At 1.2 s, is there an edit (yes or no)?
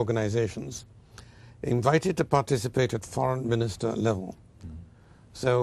no